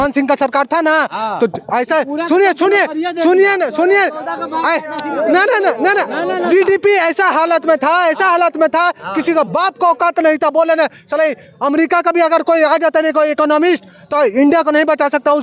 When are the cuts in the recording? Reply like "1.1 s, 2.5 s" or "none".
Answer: none